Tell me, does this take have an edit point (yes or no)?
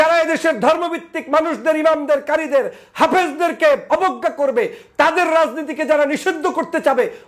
no